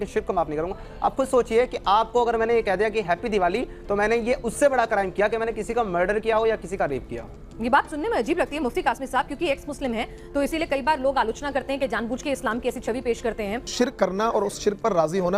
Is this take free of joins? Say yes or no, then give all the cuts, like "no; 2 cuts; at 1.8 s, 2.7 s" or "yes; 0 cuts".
no; 1 cut; at 13.7 s